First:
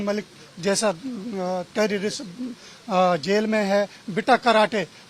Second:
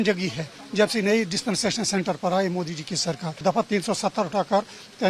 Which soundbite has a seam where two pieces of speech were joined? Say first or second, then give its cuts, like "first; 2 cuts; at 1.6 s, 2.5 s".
second; 1 cut; at 3.4 s